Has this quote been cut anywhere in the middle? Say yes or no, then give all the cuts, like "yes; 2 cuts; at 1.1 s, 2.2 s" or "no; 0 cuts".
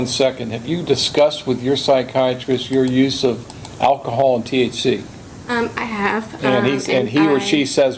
no; 0 cuts